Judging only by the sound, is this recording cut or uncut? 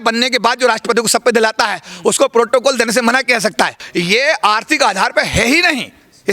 cut